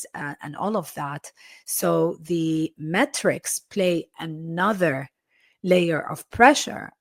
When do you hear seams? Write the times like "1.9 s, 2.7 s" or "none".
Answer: none